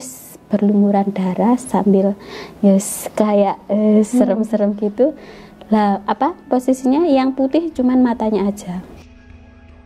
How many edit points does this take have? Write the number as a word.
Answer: zero